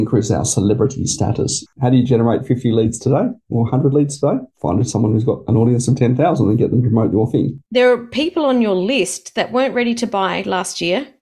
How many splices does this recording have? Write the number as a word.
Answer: three